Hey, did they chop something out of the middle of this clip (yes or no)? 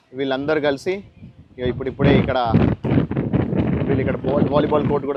no